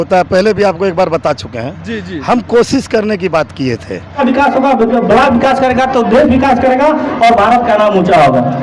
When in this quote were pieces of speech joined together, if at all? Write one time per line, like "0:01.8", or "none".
0:04.2